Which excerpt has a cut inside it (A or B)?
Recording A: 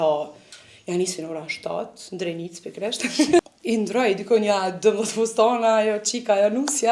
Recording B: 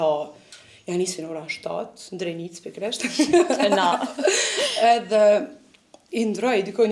A